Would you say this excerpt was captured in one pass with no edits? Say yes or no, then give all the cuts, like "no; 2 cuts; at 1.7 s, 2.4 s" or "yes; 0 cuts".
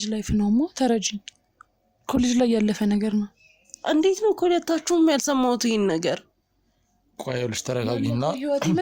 yes; 0 cuts